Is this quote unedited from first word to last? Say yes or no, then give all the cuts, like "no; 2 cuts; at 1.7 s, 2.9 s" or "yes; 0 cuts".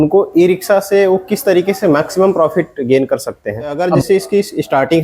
no; 1 cut; at 3.8 s